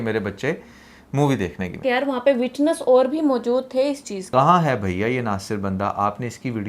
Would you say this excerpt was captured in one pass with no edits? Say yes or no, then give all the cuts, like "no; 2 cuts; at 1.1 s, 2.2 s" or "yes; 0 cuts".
no; 2 cuts; at 1.8 s, 4.1 s